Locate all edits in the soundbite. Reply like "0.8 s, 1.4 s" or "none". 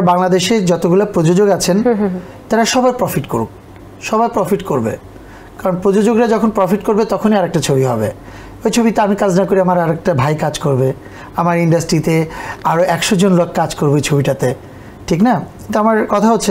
none

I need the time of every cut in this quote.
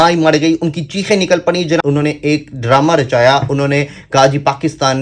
1.8 s

